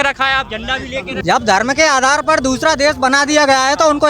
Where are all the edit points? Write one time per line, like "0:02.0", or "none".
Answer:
0:01.1